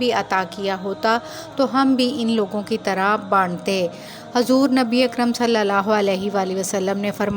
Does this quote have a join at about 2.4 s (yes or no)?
no